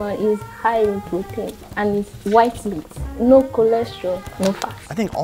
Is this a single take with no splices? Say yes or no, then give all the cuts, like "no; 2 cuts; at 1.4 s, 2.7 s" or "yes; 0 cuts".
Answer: yes; 0 cuts